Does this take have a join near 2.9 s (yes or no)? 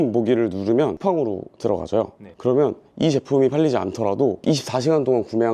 no